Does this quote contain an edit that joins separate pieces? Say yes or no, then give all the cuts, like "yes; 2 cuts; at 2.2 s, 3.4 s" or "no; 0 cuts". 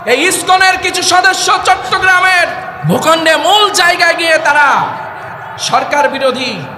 yes; 1 cut; at 2.7 s